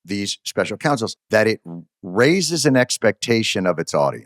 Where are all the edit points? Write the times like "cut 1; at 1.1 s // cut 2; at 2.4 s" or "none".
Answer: cut 1; at 1.2 s